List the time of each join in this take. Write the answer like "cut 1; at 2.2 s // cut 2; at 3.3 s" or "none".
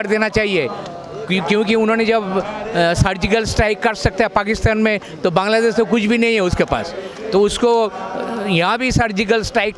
none